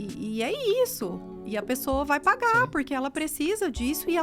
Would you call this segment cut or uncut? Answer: uncut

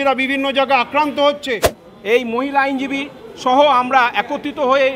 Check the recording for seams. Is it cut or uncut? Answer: cut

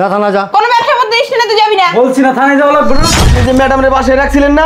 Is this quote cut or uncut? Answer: cut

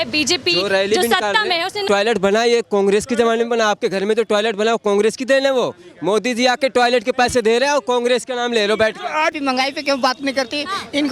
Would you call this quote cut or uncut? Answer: cut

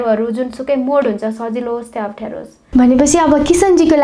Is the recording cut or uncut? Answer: cut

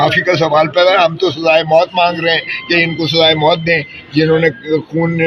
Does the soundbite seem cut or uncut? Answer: uncut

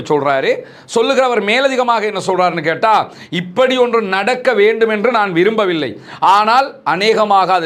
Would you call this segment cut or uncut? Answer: uncut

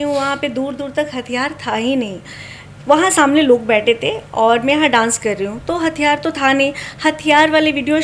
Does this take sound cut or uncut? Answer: uncut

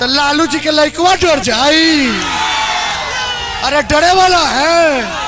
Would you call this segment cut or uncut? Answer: uncut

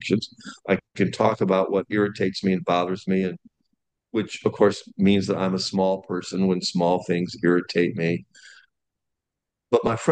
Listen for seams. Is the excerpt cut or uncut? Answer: uncut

